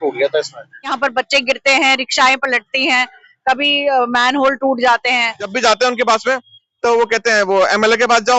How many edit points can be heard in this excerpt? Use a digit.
2